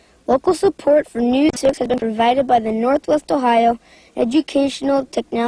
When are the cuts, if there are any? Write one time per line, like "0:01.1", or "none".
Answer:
0:01.6